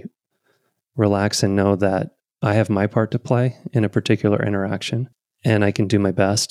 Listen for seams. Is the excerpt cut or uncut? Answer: uncut